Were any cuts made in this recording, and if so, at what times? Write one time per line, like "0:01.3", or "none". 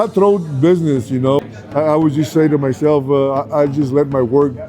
0:01.4